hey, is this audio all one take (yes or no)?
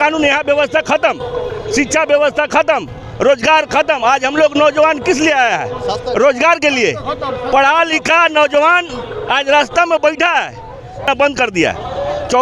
no